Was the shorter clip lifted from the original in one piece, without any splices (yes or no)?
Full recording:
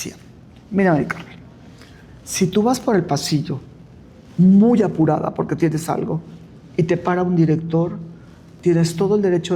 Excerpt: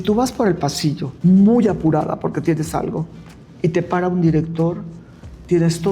no